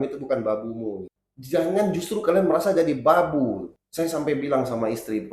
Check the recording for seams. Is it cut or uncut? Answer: cut